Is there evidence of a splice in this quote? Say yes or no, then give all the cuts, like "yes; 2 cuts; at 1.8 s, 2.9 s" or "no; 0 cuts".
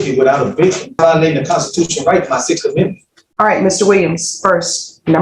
yes; 1 cut; at 1.0 s